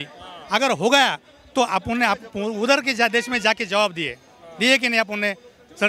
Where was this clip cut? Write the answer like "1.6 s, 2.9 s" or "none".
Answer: none